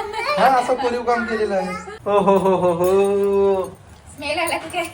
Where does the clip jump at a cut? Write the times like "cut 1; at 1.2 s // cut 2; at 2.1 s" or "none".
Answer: cut 1; at 1.9 s